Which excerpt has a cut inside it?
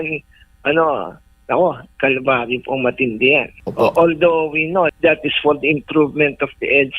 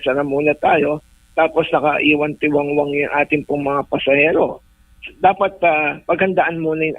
first; 2 cuts; at 3.6 s, 4.9 s

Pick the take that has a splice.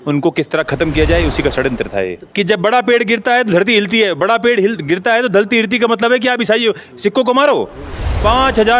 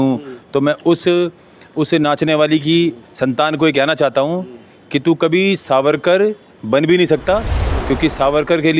first; 1 cut; at 2.2 s

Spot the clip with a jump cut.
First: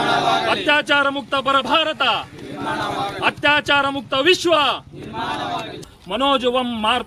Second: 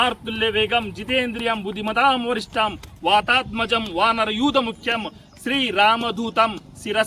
first; 1 cut; at 5.8 s

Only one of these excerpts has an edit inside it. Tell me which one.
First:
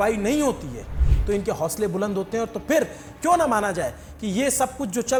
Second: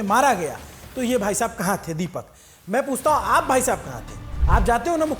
second; 1 cut; at 4.3 s

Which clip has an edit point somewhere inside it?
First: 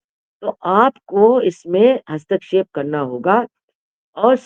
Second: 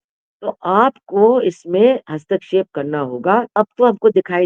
second; 1 cut; at 3.5 s

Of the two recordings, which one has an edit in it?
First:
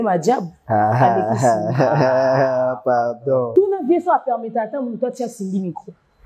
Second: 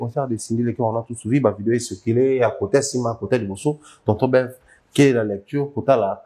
first; 1 cut; at 3.5 s

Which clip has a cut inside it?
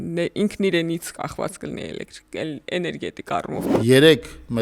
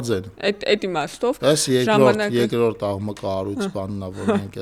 first; 1 cut; at 3.6 s

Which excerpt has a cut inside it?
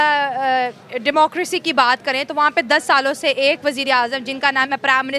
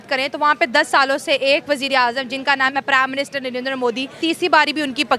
second; 1 cut; at 4.2 s

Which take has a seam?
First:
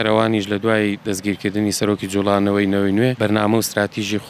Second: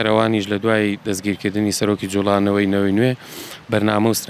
first; 1 cut; at 3.2 s

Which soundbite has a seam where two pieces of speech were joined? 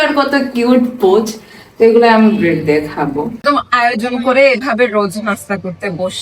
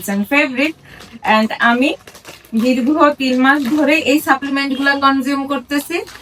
first; 1 cut; at 3.4 s

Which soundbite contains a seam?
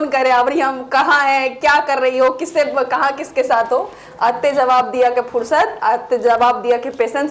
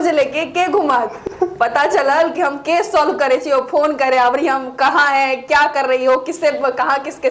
second; 1 cut; at 1.2 s

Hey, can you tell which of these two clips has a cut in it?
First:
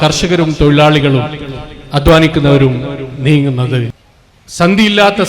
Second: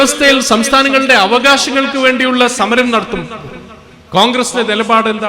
first; 1 cut; at 4.0 s

